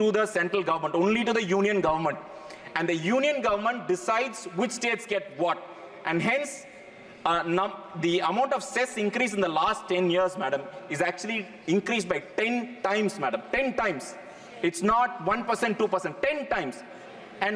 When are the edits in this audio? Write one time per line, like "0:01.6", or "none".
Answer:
none